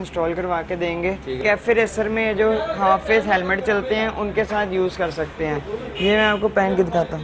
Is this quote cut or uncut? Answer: cut